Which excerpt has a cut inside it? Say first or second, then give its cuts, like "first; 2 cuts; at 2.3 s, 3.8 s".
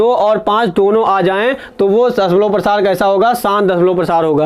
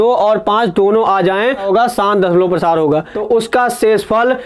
second; 2 cuts; at 1.6 s, 3.1 s